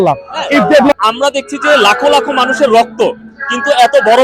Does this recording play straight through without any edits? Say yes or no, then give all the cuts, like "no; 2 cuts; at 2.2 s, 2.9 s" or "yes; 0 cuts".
no; 1 cut; at 0.9 s